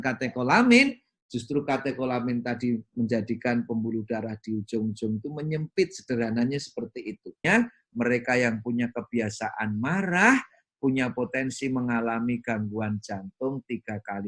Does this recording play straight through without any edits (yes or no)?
no